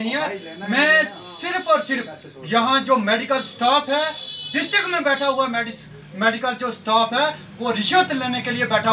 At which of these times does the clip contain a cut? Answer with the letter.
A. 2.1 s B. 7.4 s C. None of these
C